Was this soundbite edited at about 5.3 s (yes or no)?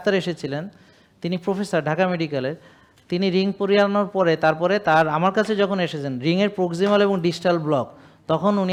no